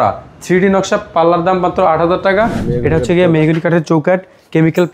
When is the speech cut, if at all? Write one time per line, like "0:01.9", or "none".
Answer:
0:02.6